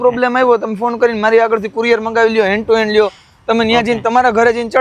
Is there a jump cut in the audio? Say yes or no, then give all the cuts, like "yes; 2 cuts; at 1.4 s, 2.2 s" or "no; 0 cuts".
no; 0 cuts